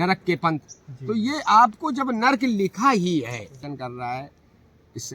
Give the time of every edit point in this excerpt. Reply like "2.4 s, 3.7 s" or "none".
3.6 s